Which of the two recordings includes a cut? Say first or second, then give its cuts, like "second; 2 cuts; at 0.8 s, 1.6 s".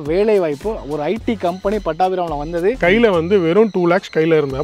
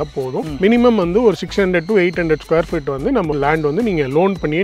first; 1 cut; at 2.8 s